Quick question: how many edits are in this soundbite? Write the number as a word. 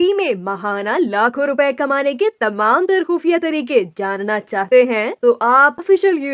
zero